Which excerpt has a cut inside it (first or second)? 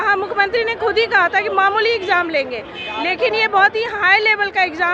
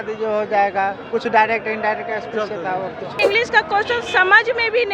second